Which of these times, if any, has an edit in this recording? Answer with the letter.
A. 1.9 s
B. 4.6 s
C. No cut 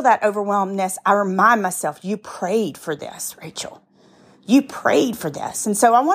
C